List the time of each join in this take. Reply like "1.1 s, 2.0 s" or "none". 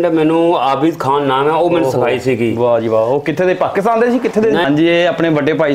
4.6 s

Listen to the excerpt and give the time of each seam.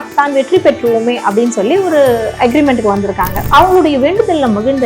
3.5 s

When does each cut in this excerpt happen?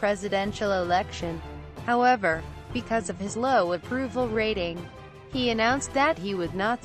2.1 s

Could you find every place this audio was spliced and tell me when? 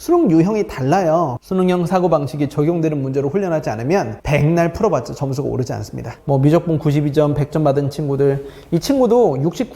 1.3 s, 6.1 s

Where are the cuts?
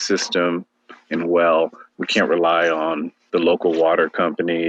none

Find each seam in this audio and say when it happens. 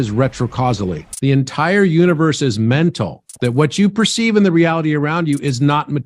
1.1 s

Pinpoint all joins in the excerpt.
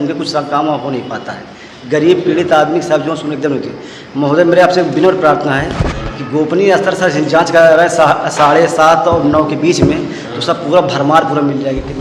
none

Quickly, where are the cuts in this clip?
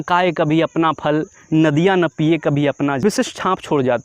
3.0 s

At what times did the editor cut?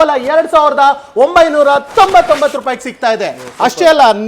none

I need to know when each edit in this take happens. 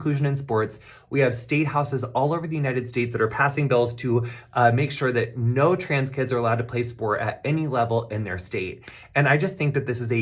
7.3 s

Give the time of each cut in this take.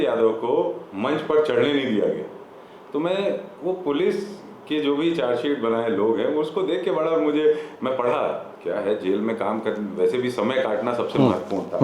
none

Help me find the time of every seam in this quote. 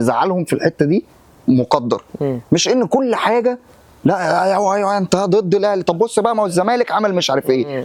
none

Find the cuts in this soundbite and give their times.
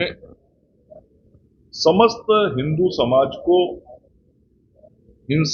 none

